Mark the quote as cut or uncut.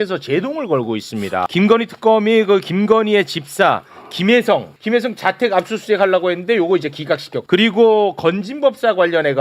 cut